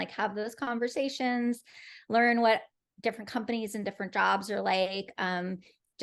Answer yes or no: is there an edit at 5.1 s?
no